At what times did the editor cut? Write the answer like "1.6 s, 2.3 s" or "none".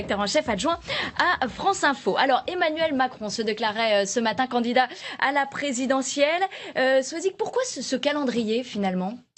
1.0 s